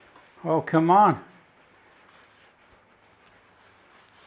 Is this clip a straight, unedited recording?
yes; 0 cuts

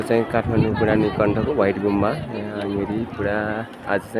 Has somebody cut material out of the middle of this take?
no; 0 cuts

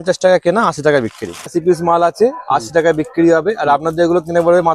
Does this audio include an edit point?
yes; 1 cut; at 1.5 s

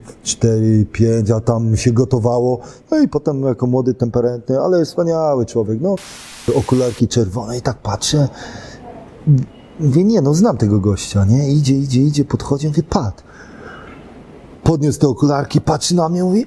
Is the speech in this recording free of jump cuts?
no; 1 cut; at 6.5 s

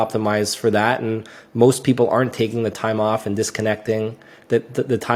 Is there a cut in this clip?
no; 0 cuts

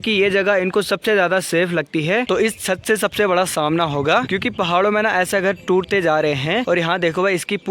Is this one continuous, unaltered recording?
no; 3 cuts; at 2.3 s, 4.3 s, 6.6 s

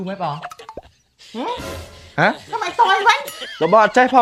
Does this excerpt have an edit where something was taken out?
no; 0 cuts

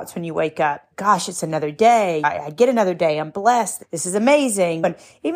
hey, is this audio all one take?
yes; 0 cuts

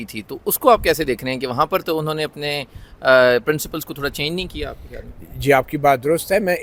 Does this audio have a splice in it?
no; 0 cuts

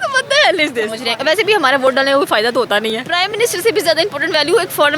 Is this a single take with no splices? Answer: no; 2 cuts; at 1.0 s, 3.0 s

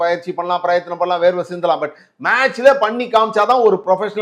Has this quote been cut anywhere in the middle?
no; 0 cuts

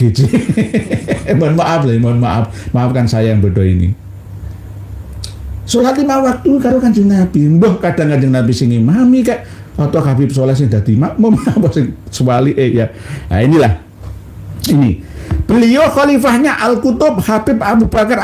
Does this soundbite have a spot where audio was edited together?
no; 0 cuts

